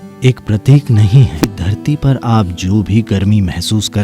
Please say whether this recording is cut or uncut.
cut